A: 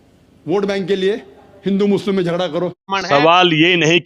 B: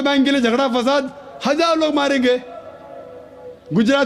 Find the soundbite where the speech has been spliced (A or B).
A